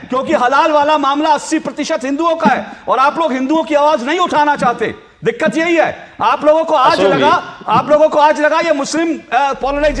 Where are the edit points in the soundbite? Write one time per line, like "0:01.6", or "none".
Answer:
none